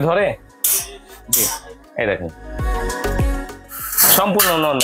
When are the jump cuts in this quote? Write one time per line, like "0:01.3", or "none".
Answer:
none

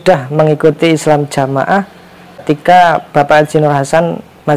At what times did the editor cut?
0:02.4

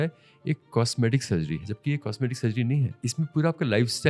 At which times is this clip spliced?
0:01.7
0:03.0

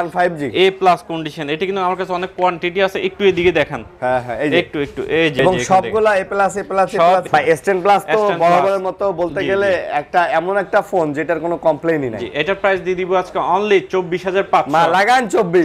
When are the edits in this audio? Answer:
0:05.3
0:07.3

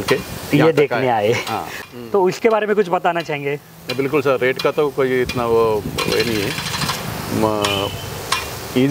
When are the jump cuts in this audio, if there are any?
0:01.7

